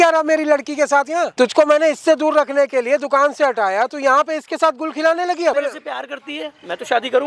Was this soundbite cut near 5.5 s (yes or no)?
yes